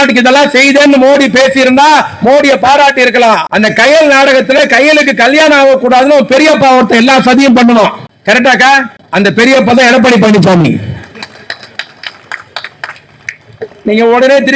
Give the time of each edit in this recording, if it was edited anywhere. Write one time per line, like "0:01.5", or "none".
0:03.5
0:09.0